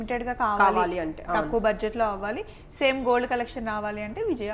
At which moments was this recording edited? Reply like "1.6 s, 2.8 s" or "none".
none